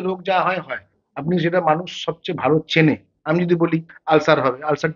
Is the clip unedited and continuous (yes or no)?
yes